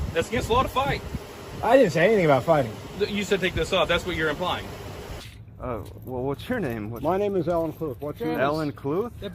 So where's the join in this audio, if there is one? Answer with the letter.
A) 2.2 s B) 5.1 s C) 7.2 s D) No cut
B